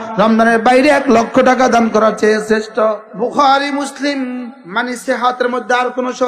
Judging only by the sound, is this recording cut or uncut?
cut